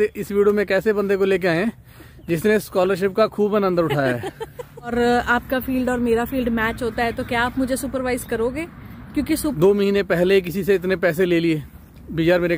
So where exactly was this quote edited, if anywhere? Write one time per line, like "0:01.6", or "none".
0:04.9
0:09.4